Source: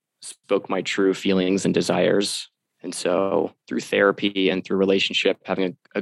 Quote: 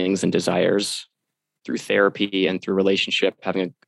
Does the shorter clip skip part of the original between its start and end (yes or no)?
yes